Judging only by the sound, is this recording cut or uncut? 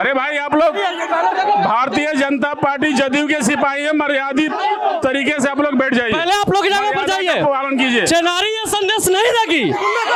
uncut